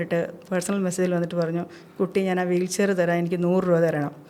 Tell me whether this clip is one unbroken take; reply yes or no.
yes